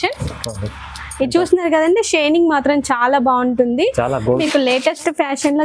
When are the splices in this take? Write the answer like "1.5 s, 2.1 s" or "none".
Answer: 4.2 s